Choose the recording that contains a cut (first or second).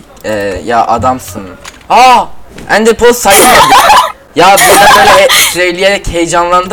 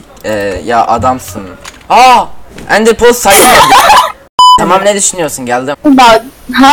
second